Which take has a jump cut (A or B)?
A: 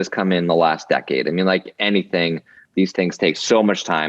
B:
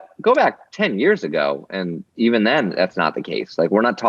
A